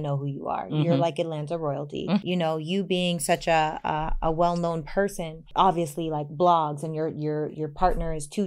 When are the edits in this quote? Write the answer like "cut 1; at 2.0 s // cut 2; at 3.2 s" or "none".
cut 1; at 2.2 s // cut 2; at 5.4 s

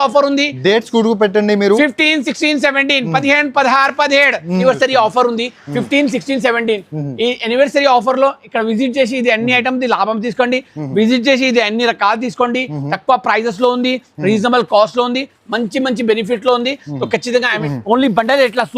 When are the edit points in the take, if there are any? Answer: cut 1; at 4.6 s // cut 2; at 17.7 s

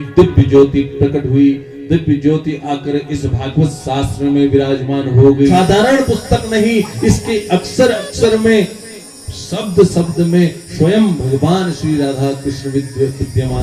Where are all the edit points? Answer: cut 1; at 5.5 s

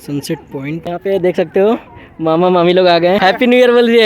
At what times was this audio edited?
cut 1; at 1.0 s // cut 2; at 3.2 s

